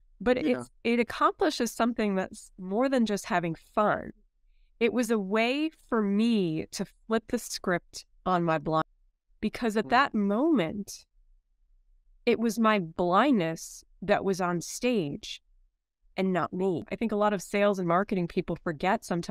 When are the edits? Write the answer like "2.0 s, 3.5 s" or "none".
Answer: 8.8 s, 16.9 s